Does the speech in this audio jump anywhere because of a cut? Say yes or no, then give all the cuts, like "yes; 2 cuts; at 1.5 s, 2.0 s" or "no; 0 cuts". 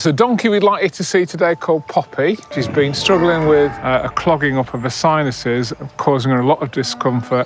yes; 1 cut; at 2.5 s